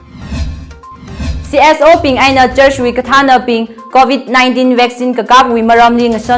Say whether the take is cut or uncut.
cut